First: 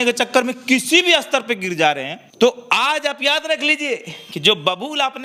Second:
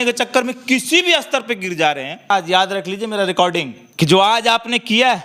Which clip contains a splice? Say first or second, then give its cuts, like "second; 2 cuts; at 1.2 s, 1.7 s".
second; 1 cut; at 2.3 s